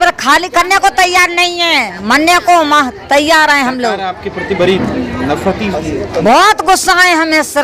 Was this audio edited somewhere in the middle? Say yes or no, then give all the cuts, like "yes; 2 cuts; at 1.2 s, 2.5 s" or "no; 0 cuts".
no; 0 cuts